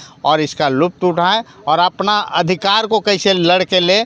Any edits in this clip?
no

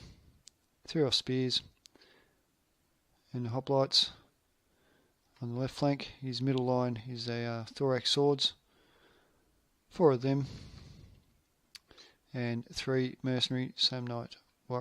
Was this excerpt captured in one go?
no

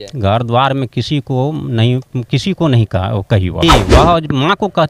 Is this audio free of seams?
no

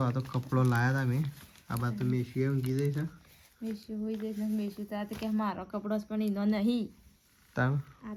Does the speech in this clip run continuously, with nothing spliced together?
yes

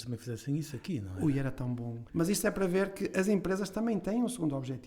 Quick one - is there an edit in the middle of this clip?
yes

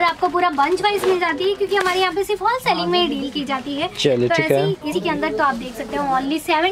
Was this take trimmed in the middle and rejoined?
yes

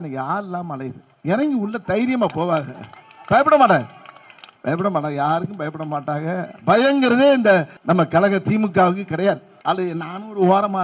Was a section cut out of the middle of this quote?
yes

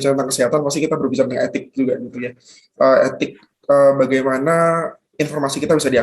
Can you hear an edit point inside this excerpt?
no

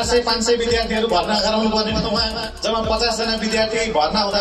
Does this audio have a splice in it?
no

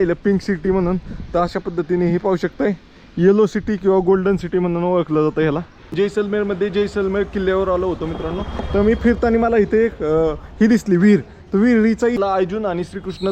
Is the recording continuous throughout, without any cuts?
no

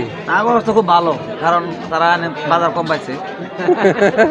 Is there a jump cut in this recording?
no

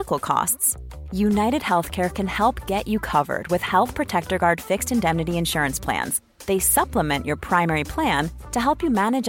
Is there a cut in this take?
no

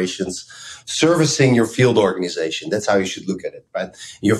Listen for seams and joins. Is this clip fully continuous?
yes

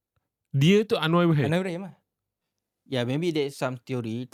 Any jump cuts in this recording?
no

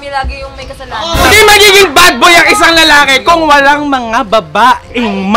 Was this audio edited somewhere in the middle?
yes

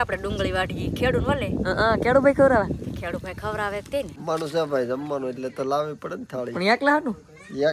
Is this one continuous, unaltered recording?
no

